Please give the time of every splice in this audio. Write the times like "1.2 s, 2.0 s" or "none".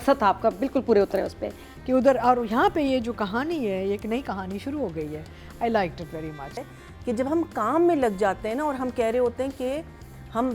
1.6 s, 6.5 s